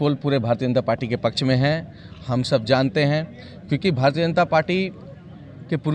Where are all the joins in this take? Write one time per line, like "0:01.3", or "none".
none